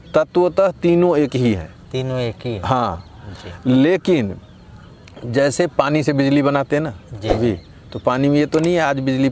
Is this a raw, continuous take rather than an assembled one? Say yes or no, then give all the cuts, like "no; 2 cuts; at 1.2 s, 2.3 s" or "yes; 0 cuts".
yes; 0 cuts